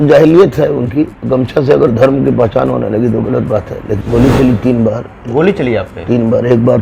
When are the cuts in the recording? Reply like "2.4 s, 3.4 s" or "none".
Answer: 3.9 s